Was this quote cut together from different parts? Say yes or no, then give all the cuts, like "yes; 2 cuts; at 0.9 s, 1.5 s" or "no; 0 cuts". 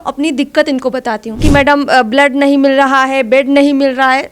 yes; 1 cut; at 1.4 s